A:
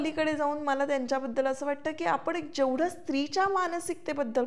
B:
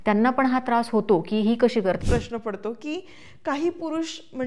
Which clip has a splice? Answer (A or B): B